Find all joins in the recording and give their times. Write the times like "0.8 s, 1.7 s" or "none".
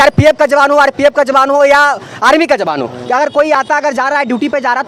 none